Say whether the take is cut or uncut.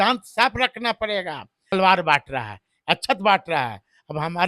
cut